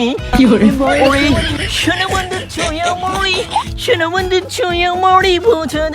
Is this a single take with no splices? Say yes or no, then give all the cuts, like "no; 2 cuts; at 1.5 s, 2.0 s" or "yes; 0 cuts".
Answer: no; 1 cut; at 1.0 s